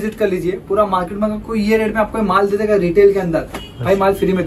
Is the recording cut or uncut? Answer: uncut